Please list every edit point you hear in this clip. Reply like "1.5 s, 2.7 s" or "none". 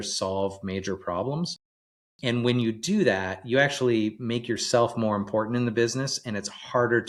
none